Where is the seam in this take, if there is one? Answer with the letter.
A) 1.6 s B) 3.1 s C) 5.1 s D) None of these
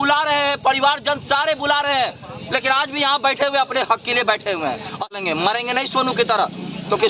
C